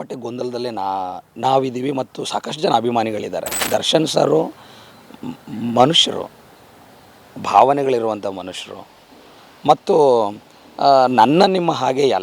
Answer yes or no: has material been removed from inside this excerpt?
yes